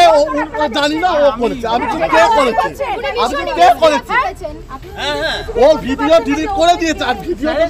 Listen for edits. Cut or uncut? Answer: uncut